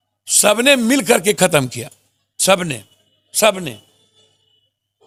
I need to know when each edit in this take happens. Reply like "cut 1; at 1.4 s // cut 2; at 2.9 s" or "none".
none